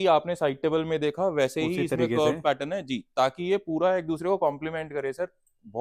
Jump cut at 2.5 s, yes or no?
no